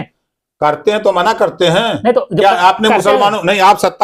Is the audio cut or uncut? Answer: uncut